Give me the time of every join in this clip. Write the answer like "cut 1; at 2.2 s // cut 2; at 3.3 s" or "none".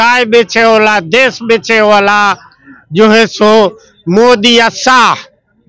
none